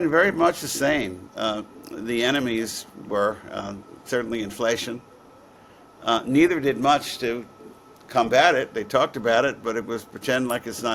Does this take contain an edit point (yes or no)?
no